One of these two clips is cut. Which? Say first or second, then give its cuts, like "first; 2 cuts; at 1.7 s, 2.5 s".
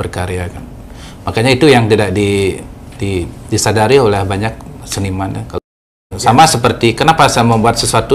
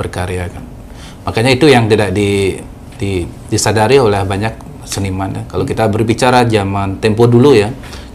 first; 1 cut; at 5.6 s